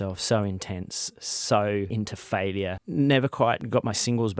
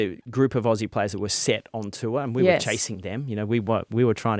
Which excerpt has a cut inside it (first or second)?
first